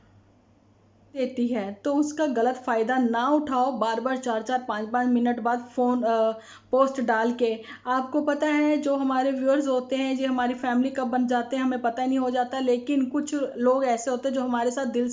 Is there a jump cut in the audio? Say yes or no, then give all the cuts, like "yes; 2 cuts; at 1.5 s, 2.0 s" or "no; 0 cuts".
yes; 1 cut; at 1.2 s